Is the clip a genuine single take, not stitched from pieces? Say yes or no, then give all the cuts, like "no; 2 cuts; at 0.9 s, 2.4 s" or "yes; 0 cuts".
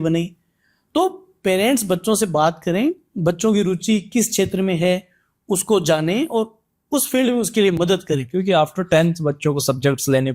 yes; 0 cuts